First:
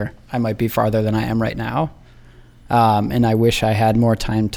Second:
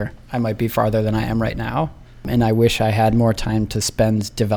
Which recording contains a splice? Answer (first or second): second